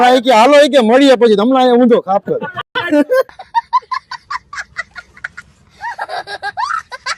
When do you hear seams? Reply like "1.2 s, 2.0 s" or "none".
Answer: none